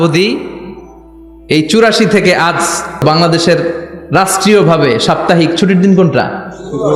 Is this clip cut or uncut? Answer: cut